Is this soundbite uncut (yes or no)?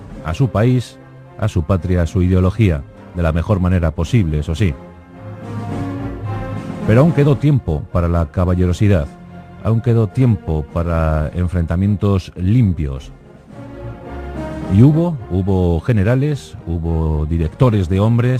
no